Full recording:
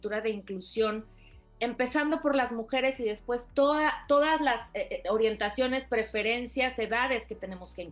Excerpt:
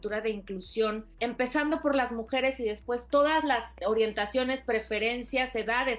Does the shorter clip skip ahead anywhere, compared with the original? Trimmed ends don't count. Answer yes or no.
yes